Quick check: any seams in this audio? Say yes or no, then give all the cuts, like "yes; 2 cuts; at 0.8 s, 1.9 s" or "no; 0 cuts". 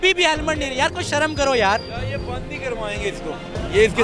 no; 0 cuts